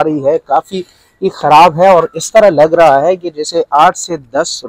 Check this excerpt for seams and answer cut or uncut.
uncut